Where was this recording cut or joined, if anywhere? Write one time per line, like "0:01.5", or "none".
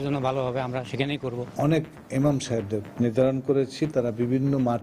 0:01.4
0:03.9